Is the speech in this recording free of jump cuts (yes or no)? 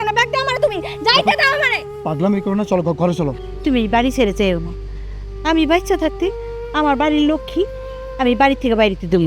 no